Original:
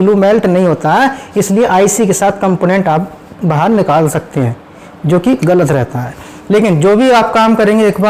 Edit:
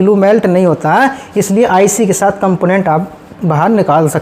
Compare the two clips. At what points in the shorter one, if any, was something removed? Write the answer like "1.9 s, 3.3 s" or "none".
none